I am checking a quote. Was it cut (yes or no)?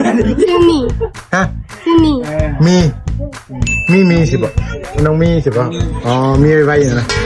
no